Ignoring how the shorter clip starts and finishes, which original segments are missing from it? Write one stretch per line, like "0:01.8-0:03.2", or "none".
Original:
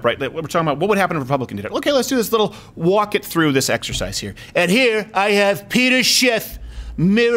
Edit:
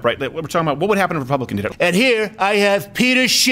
0:01.7-0:04.4